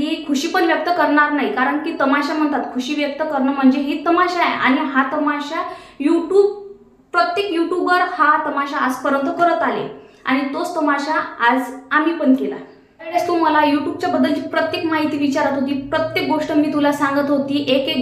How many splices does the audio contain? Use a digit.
1